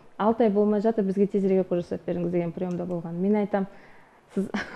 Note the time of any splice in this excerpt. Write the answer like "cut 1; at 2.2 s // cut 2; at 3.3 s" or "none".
none